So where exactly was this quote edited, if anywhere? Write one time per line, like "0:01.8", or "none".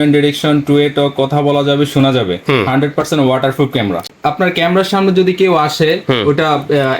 0:04.0

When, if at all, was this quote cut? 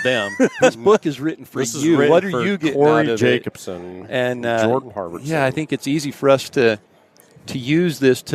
none

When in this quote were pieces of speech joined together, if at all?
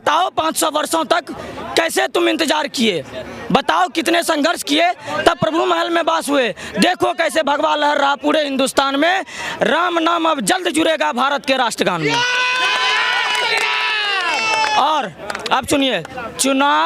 none

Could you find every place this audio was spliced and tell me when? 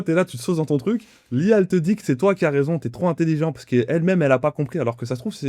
none

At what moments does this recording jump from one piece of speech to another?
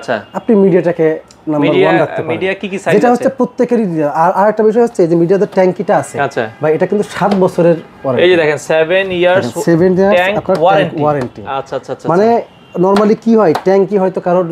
none

